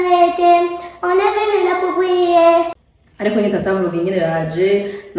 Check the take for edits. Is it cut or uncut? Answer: cut